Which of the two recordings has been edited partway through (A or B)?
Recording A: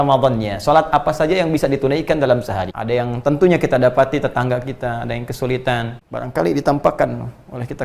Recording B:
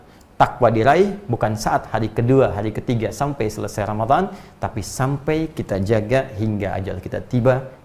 A